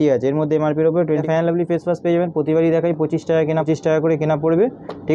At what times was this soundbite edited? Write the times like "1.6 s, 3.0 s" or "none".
1.2 s, 3.7 s